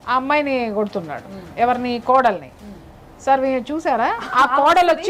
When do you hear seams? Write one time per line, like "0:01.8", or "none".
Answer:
none